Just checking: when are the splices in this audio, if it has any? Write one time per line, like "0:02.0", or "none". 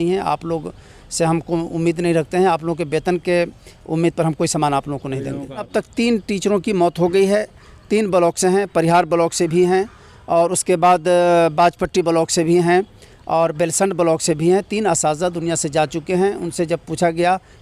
0:05.6